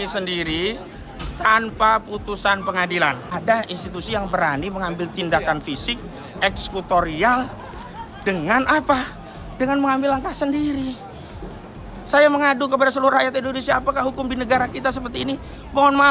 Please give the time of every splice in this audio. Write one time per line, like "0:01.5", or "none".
0:03.2